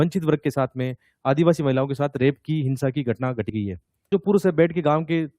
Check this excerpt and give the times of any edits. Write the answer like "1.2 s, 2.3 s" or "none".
4.1 s